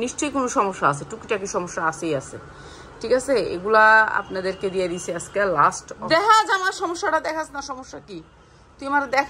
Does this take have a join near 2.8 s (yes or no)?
no